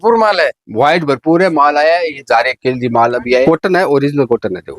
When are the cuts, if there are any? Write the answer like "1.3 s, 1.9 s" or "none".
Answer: 3.4 s